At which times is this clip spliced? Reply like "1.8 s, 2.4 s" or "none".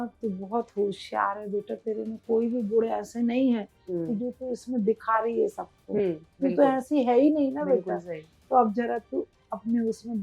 none